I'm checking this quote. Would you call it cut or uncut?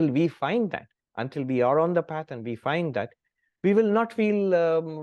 uncut